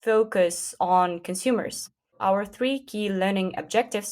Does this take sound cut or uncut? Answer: cut